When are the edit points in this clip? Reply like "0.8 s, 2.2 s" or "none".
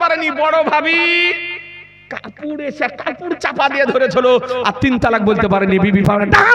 none